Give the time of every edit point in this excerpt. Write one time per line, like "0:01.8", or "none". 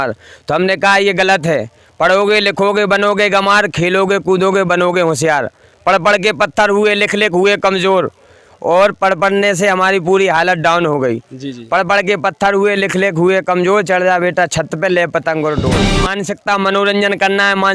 0:16.1